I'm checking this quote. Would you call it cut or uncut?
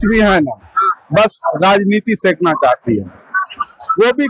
uncut